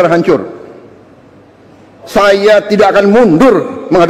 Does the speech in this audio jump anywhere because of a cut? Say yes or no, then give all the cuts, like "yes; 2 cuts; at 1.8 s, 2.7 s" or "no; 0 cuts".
yes; 1 cut; at 2.0 s